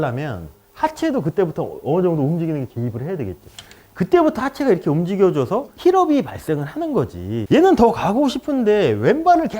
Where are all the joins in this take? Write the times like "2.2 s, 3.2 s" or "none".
7.4 s